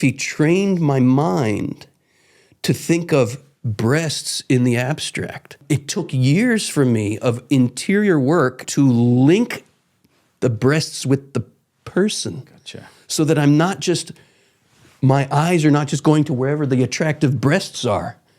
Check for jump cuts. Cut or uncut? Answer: cut